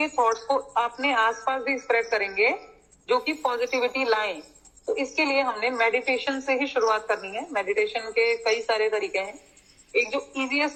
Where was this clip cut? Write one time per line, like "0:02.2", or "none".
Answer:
none